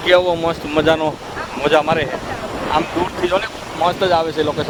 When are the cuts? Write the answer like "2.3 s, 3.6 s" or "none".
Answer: none